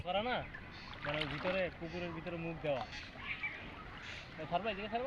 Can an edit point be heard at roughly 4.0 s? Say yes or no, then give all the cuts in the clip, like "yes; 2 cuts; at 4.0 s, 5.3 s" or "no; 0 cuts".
no; 0 cuts